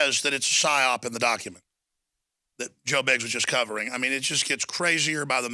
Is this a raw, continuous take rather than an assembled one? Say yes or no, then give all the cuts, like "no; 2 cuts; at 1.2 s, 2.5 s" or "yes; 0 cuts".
yes; 0 cuts